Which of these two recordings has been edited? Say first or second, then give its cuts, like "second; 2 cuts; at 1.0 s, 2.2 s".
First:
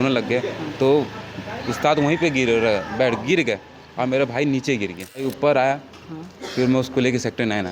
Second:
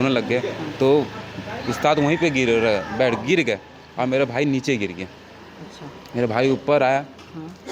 first; 1 cut; at 5.2 s